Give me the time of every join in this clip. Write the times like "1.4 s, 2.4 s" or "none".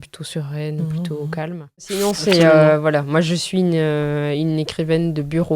2.0 s